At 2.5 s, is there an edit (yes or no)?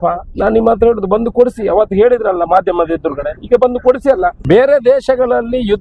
no